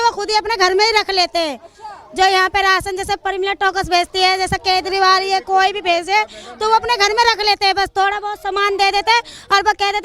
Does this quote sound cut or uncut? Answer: uncut